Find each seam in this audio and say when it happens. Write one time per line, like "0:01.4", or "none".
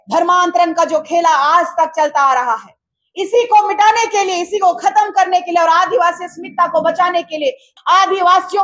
0:07.7